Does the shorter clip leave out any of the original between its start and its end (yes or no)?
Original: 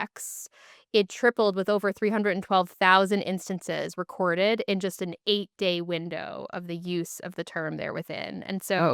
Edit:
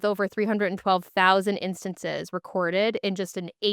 no